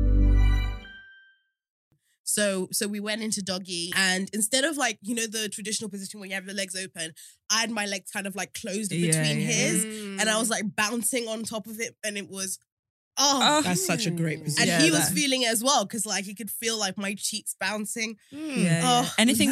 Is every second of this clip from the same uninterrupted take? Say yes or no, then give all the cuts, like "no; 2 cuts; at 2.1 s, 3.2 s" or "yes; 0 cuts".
no; 2 cuts; at 1.9 s, 3.9 s